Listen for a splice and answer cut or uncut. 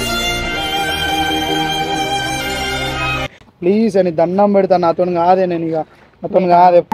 cut